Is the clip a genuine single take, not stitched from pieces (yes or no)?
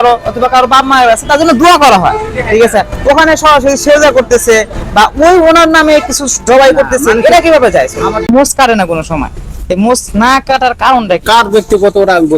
no